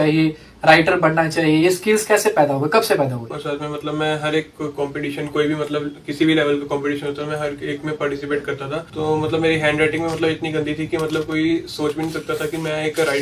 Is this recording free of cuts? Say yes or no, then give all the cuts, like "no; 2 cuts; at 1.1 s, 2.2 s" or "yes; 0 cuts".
no; 2 cuts; at 3.3 s, 8.9 s